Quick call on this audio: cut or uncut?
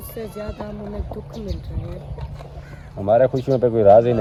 uncut